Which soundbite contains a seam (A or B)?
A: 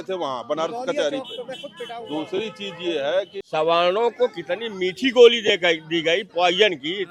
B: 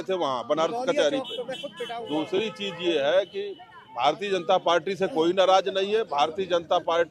A